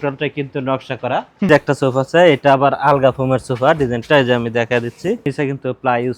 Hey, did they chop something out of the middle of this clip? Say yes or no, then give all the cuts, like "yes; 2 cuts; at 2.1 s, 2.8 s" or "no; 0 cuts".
yes; 2 cuts; at 1.5 s, 5.3 s